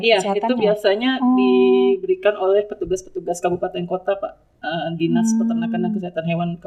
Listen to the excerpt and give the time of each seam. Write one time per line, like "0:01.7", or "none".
none